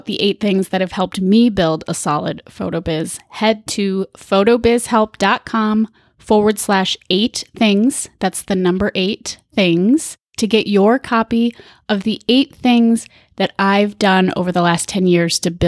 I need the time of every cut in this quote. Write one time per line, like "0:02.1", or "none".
none